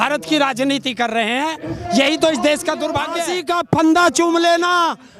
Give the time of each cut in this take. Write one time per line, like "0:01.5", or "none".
0:03.4